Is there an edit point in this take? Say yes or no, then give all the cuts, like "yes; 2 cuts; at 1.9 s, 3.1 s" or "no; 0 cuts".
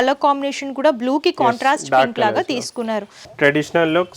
yes; 1 cut; at 3.3 s